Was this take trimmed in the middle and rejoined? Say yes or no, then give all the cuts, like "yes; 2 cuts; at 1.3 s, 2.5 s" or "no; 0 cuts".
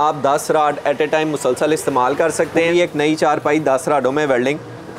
yes; 1 cut; at 2.7 s